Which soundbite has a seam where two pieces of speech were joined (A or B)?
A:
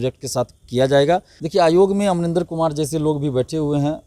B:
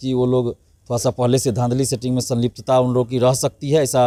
A